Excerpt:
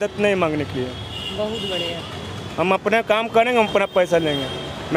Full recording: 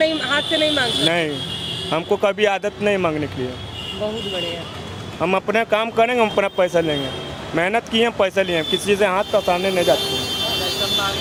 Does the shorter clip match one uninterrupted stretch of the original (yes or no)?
yes